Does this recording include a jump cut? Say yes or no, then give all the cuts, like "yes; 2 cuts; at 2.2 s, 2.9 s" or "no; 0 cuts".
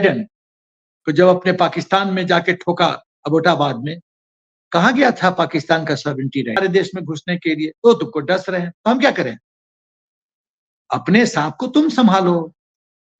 yes; 1 cut; at 6.6 s